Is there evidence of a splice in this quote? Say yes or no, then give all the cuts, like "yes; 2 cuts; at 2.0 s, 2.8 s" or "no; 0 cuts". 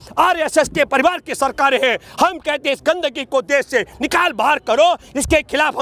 no; 0 cuts